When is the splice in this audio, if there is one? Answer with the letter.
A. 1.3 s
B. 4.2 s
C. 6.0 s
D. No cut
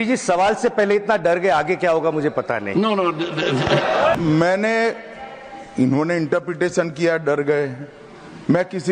B